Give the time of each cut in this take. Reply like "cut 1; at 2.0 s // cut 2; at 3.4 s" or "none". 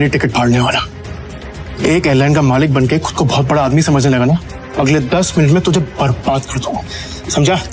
cut 1; at 4.6 s